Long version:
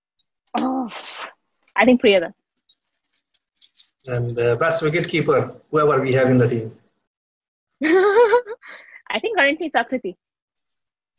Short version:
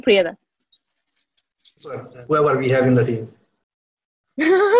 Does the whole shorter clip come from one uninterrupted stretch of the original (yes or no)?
no